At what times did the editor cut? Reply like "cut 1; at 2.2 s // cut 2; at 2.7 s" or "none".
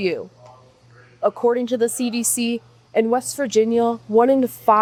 none